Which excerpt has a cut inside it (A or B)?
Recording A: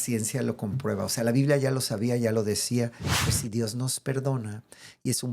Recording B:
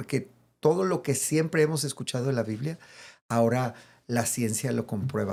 A